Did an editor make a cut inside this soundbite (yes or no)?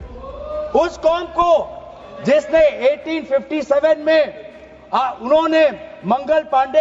no